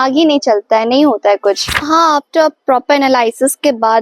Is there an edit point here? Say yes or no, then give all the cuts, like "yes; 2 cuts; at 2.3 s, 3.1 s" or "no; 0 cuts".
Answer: yes; 1 cut; at 1.7 s